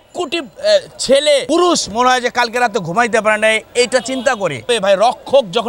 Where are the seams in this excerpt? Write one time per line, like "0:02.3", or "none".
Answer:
0:01.4
0:04.7